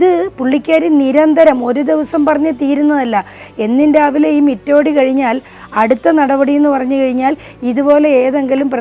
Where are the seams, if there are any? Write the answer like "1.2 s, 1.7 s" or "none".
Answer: none